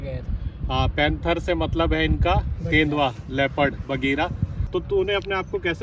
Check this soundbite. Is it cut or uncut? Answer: cut